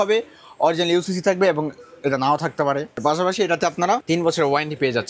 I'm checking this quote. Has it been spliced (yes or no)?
yes